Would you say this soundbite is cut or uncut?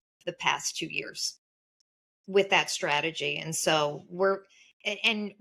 cut